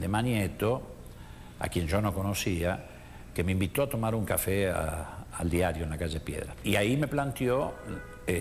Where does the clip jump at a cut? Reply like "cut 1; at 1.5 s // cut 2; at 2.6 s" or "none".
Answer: cut 1; at 6.6 s